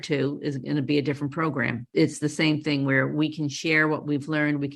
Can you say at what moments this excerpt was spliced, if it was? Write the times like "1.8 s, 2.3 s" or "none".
none